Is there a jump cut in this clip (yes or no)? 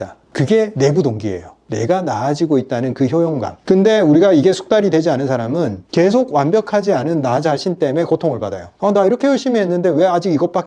yes